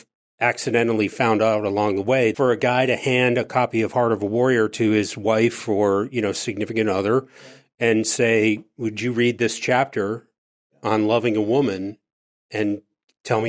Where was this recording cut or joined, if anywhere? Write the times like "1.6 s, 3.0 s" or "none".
2.3 s

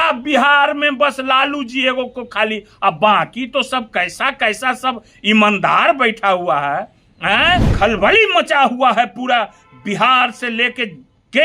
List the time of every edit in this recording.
7.7 s

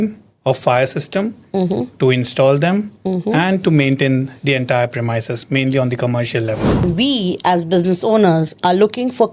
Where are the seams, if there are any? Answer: 6.8 s

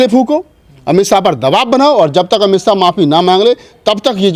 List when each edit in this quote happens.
none

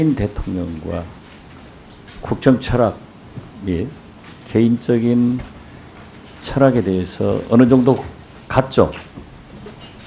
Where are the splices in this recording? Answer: 8.3 s

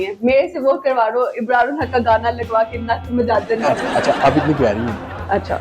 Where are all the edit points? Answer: 3.8 s

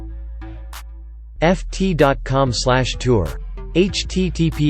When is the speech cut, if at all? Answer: 1.4 s

